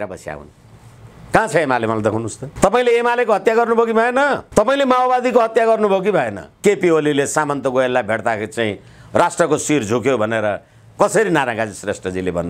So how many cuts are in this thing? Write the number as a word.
three